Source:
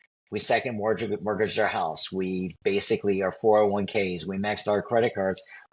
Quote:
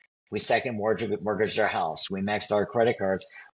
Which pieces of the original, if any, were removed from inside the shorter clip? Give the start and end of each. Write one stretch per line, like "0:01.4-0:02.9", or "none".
0:02.0-0:04.2